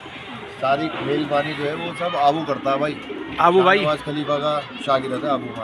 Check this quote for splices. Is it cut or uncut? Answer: uncut